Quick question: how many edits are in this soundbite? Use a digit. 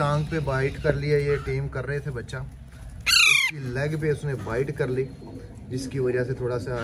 0